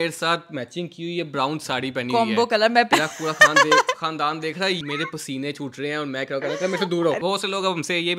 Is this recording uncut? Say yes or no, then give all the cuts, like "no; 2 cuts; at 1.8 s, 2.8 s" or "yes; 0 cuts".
no; 3 cuts; at 2.9 s, 4.8 s, 7.2 s